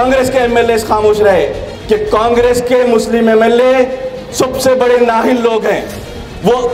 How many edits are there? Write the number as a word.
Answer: one